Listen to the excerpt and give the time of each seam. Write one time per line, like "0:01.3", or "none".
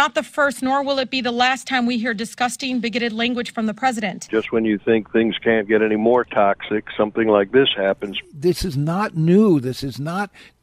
0:04.2
0:08.1